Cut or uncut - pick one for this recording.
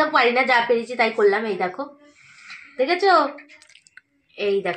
uncut